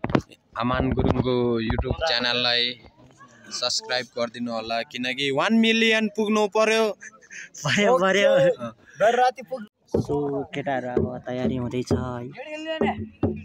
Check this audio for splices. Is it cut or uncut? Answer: uncut